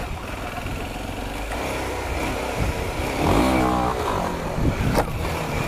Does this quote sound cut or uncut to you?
uncut